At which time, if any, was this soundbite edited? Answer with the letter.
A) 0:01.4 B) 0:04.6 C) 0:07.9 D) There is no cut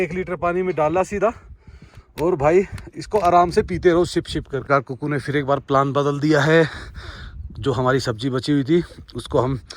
B